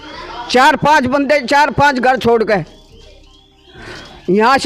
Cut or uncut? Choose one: uncut